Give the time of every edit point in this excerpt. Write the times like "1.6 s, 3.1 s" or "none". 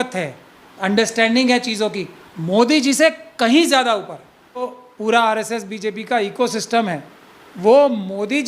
4.8 s